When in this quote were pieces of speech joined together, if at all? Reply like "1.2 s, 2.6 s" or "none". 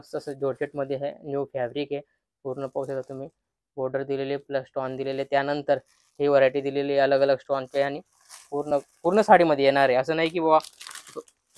none

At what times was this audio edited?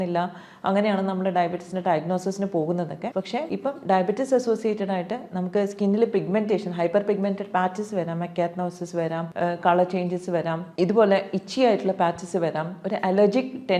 3.3 s, 9.3 s, 10.6 s

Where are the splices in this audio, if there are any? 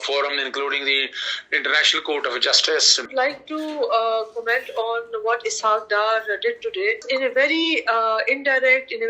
3.1 s, 7.0 s

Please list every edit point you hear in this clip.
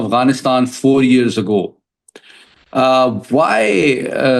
none

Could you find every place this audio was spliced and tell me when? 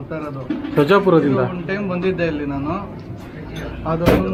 none

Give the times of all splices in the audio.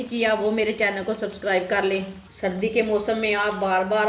2.2 s

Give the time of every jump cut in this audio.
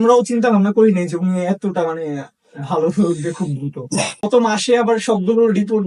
4.2 s

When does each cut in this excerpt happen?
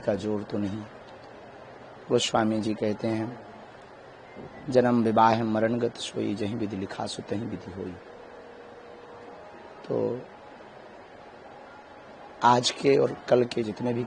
none

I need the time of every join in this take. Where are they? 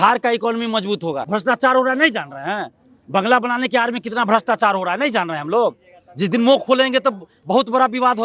1.2 s

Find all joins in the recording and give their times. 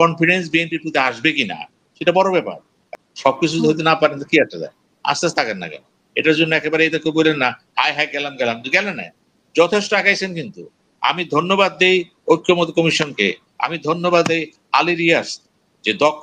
2.8 s

